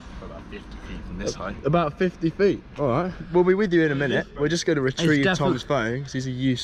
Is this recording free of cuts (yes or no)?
yes